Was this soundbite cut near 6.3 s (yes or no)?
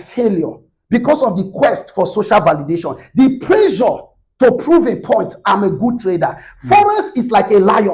no